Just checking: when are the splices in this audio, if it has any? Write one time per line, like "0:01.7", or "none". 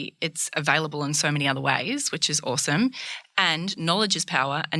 none